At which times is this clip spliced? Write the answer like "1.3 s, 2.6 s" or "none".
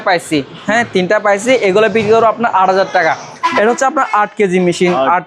3.3 s